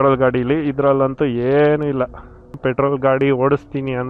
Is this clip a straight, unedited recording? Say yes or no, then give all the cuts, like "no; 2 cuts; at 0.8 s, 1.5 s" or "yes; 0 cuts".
no; 1 cut; at 2.6 s